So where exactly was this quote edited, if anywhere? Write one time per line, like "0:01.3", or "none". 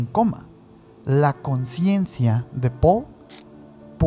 none

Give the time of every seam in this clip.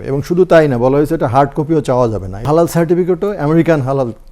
0:02.5

